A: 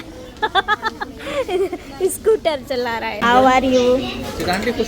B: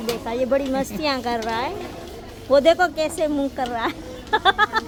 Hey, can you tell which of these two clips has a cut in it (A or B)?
A